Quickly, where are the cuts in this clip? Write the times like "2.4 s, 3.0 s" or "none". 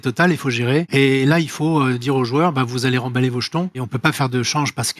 0.9 s, 3.9 s